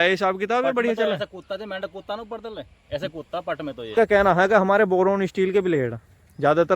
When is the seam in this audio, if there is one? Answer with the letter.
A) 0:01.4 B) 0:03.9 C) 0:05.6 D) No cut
B